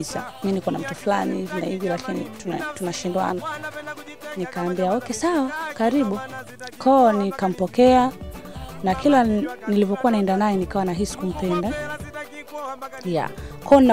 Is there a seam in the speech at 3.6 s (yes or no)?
no